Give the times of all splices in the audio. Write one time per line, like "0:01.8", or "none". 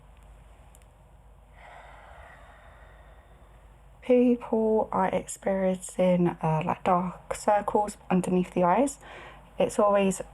0:04.0
0:07.9